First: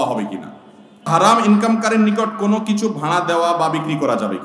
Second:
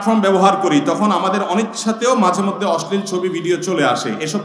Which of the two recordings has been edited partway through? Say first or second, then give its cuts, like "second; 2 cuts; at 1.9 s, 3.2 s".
first; 1 cut; at 1.1 s